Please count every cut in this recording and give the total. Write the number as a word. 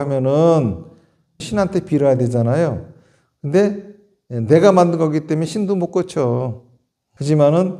one